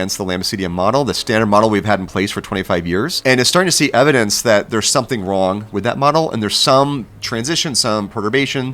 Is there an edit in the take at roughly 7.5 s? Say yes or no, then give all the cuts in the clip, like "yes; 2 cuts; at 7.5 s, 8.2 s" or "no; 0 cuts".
no; 1 cut; at 3.1 s